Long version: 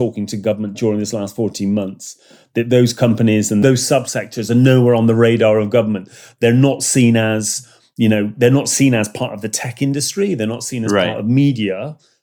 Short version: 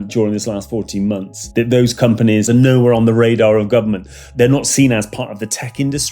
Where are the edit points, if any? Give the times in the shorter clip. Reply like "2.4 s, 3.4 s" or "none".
1.4 s, 2.5 s, 4.3 s